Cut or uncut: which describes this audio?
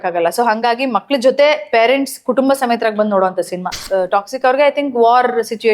cut